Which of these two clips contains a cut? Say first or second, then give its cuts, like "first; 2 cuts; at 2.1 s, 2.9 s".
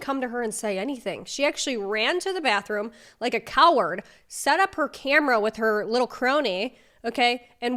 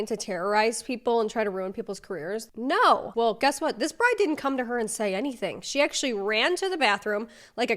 second; 2 cuts; at 2.4 s, 3.1 s